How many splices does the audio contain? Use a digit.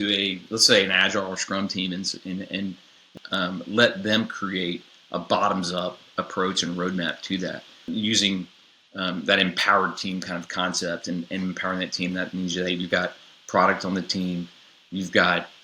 2